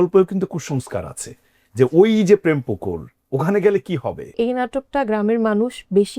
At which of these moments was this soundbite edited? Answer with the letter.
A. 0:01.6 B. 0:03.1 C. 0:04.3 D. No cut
C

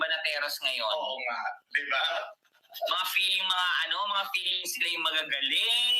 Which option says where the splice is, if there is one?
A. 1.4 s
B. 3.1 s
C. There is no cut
C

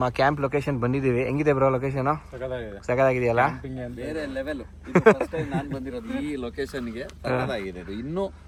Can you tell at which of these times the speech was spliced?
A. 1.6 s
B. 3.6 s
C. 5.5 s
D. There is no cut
D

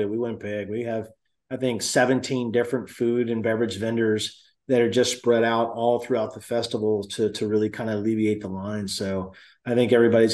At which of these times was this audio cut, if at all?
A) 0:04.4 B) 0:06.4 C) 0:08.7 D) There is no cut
D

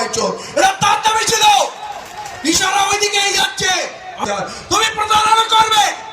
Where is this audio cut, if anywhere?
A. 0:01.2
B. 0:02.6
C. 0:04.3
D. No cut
C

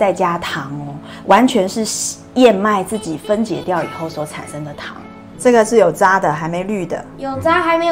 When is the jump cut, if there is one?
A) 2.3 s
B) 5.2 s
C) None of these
B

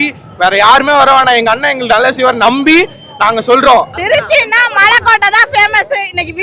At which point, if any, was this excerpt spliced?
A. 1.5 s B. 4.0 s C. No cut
B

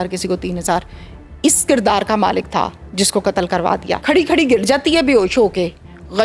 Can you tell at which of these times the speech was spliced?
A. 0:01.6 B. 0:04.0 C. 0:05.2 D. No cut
B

